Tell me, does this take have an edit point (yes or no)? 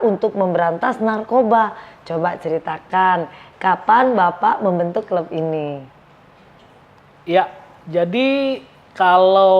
no